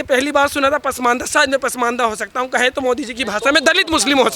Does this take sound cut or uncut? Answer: uncut